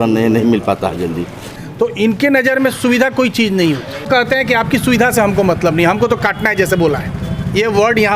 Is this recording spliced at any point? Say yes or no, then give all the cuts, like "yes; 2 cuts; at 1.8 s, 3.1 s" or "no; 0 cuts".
yes; 2 cuts; at 1.4 s, 4.1 s